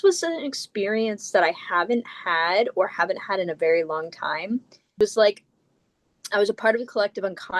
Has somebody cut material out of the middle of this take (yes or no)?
yes